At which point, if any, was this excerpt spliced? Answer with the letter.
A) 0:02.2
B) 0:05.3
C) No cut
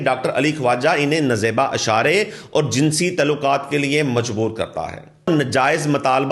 B